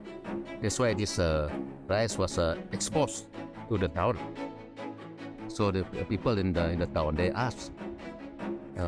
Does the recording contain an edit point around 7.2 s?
no; 0 cuts

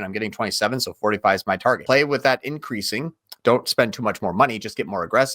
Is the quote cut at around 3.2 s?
no; 1 cut; at 1.8 s

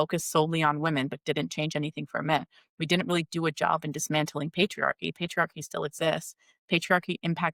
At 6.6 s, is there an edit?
no; 0 cuts

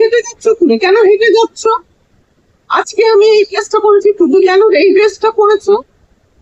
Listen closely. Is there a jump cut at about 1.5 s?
no; 0 cuts

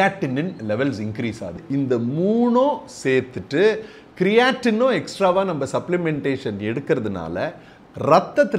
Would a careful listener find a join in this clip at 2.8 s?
no; 1 cut; at 1.6 s

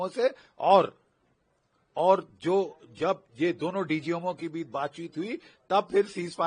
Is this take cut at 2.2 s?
no; 0 cuts

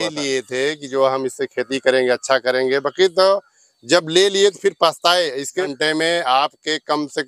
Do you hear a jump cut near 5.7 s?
yes; 1 cut; at 5.7 s

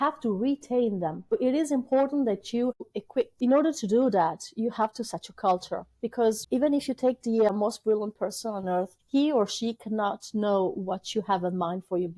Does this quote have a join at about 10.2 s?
no; 5 cuts; at 1.3 s, 2.8 s, 6.4 s, 7.5 s, 9.0 s

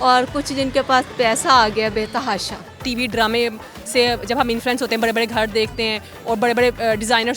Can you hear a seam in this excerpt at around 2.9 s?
yes; 1 cut; at 2.9 s

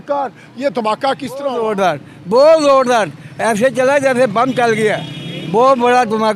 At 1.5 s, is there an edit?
yes; 1 cut; at 1.5 s

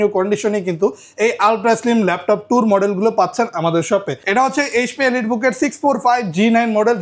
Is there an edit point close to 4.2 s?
yes; 1 cut; at 4.2 s

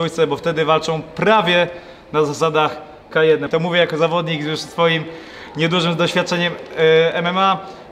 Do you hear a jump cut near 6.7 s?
no; 1 cut; at 3.5 s

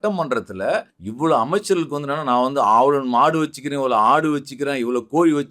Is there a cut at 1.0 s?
yes; 1 cut; at 1.0 s

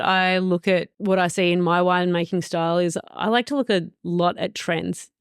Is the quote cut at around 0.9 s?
yes; 1 cut; at 0.9 s

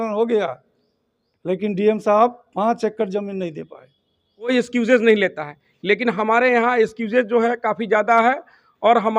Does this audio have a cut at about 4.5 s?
yes; 1 cut; at 4.5 s

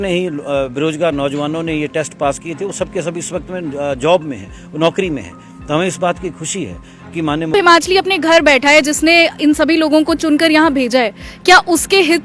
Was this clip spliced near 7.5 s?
yes; 1 cut; at 7.5 s

